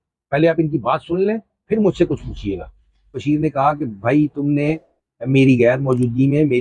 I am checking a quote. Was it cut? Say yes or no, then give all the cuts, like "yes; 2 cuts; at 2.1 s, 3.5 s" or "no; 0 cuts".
yes; 1 cut; at 3.2 s